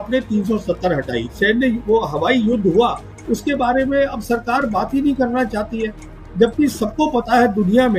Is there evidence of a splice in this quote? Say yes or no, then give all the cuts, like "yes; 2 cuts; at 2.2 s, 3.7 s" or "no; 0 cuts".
yes; 1 cut; at 1.3 s